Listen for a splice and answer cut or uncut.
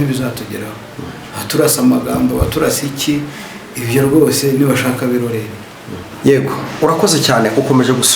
cut